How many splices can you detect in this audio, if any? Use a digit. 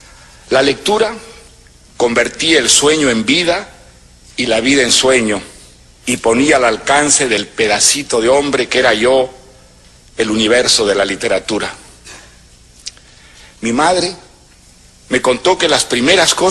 1